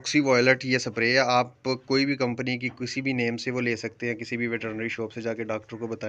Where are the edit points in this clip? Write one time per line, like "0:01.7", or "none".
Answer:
none